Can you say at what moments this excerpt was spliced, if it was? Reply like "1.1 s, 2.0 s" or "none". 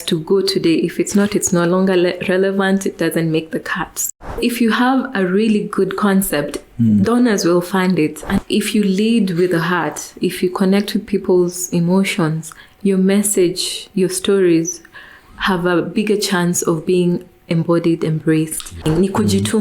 4.1 s, 8.4 s, 18.8 s